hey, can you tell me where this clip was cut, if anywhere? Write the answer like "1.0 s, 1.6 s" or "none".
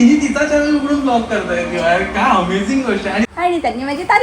2.9 s